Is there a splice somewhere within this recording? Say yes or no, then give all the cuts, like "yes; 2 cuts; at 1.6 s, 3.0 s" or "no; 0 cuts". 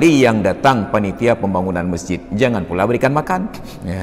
no; 0 cuts